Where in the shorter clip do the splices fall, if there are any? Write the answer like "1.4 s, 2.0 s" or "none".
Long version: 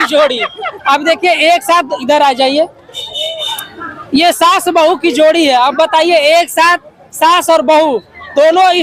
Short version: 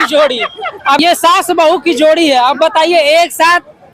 1.0 s